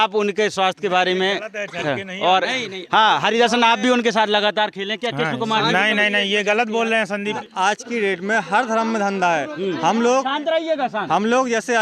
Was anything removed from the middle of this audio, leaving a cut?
yes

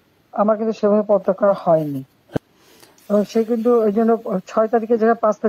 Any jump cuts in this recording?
yes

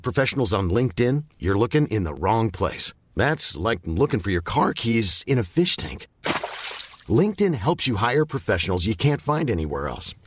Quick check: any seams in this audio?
no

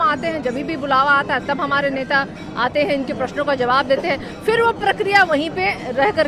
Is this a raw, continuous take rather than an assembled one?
yes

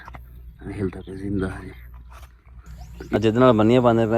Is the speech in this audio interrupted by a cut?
yes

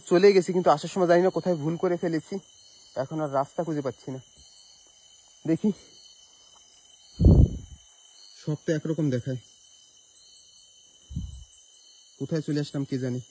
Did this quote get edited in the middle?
no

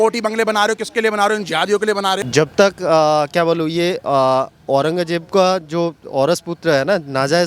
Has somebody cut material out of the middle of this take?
yes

